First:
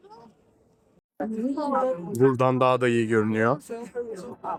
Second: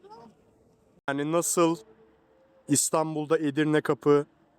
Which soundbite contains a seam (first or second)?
second